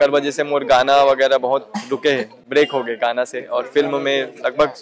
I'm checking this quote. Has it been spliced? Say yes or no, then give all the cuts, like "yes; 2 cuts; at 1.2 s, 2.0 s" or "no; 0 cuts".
no; 0 cuts